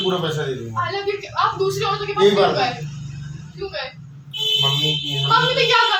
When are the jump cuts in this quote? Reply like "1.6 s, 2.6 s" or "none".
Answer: none